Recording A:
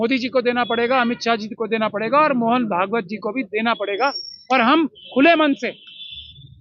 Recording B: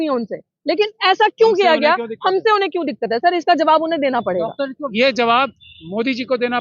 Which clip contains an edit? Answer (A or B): B